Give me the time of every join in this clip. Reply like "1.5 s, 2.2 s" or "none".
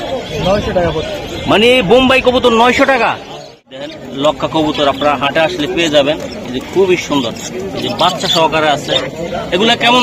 3.8 s